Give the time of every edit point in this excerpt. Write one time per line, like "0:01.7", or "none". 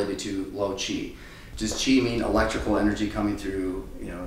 0:01.4